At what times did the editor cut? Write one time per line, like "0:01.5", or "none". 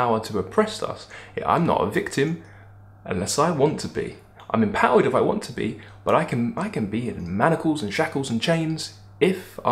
none

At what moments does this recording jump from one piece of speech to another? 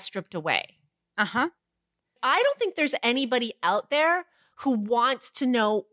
0:02.2

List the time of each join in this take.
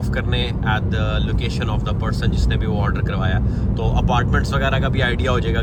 none

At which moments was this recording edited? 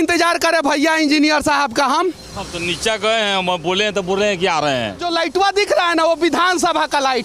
0:05.0

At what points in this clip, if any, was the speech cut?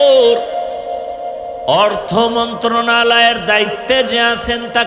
none

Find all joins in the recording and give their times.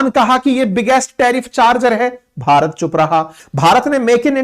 0:03.4

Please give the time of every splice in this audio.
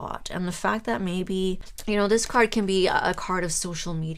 0:01.7

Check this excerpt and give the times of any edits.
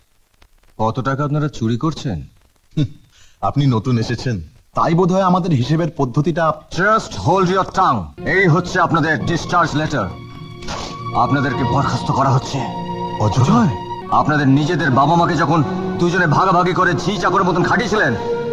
0:08.1
0:13.9

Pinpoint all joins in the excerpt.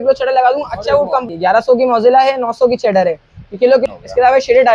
0:01.3
0:03.8

